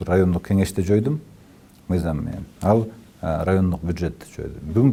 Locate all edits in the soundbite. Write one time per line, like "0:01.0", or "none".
none